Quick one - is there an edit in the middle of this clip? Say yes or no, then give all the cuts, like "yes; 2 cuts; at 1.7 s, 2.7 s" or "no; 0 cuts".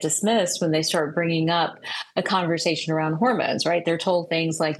no; 0 cuts